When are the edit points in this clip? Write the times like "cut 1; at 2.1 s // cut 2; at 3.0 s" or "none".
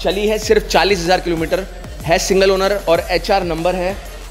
none

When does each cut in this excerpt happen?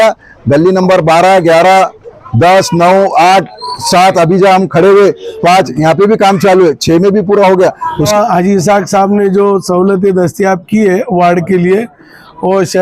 cut 1; at 8.1 s

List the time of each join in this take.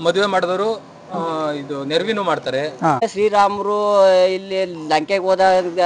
cut 1; at 3.0 s

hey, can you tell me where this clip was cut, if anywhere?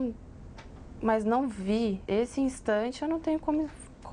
cut 1; at 2.0 s

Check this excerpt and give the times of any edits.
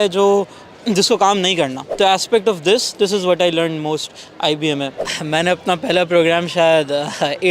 cut 1; at 1.9 s // cut 2; at 5.0 s

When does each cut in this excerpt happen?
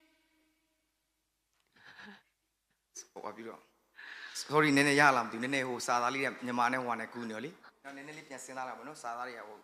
cut 1; at 7.6 s

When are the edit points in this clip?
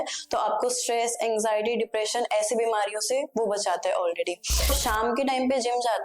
cut 1; at 4.7 s

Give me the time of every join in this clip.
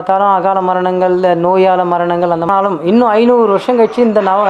cut 1; at 2.5 s

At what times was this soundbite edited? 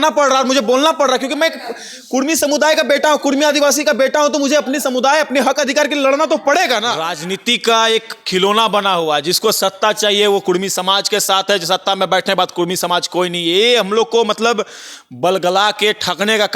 cut 1; at 7.1 s

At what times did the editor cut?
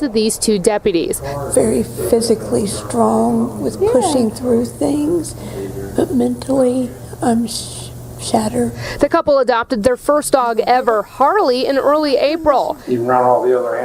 cut 1; at 2.8 s // cut 2; at 11.1 s

